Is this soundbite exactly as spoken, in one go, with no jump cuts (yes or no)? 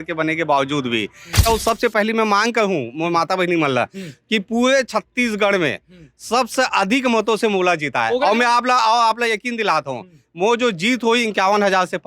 no